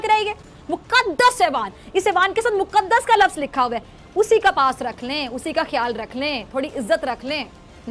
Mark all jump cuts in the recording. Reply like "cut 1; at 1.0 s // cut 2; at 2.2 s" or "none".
none